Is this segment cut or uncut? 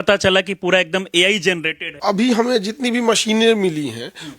cut